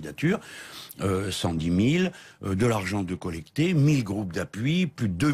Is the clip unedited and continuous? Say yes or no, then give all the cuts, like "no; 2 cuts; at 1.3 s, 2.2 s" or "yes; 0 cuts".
no; 1 cut; at 3.3 s